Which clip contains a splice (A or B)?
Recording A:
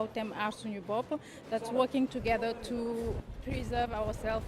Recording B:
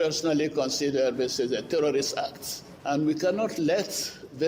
A